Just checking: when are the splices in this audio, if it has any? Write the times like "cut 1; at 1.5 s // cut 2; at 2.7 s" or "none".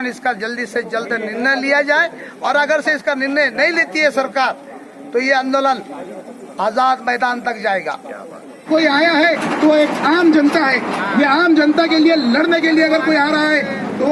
cut 1; at 8.7 s